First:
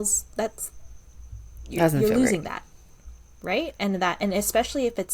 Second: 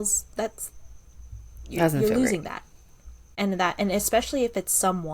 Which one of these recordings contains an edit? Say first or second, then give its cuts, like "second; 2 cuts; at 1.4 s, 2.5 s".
second; 1 cut; at 3.3 s